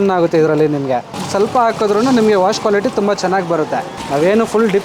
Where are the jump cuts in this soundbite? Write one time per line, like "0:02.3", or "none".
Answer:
0:01.1
0:03.9